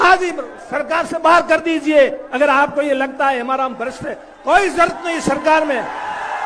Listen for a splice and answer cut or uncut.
uncut